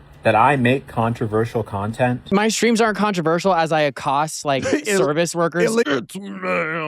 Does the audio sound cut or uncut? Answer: cut